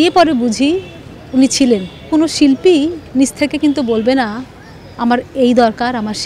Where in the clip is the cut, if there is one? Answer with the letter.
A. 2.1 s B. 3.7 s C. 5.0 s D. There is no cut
A